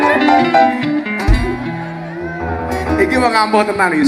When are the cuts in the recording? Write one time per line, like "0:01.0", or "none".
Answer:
none